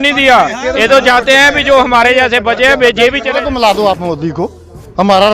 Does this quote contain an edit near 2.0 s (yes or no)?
no